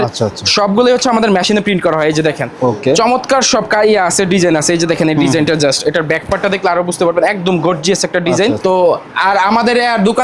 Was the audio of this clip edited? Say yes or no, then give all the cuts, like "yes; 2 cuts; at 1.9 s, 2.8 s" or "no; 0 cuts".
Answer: no; 0 cuts